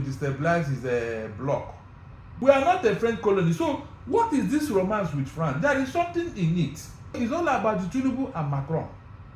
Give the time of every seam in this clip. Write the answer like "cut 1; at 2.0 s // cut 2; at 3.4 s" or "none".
cut 1; at 2.4 s // cut 2; at 7.2 s